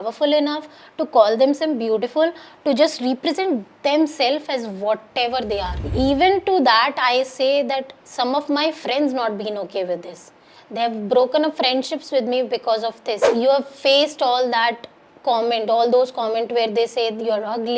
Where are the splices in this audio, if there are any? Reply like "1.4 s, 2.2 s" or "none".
5.8 s, 13.3 s